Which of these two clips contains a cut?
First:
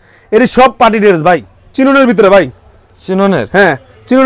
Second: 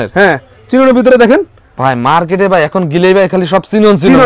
first; 1 cut; at 1.4 s

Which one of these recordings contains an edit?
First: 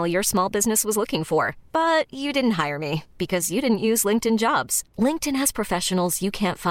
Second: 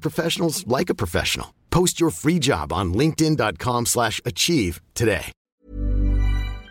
second; 1 cut; at 5.4 s

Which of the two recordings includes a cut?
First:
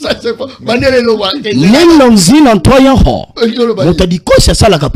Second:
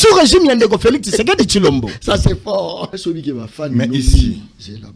second; 1 cut; at 2.9 s

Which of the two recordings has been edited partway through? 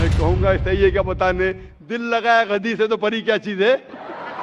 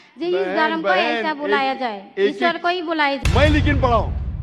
second; 1 cut; at 3.2 s

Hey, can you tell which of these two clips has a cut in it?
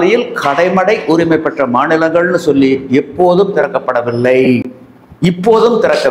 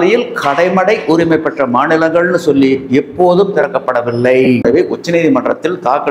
second; 1 cut; at 4.6 s

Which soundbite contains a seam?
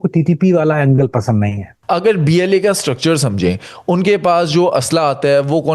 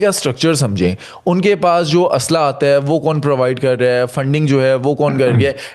first; 1 cut; at 1.7 s

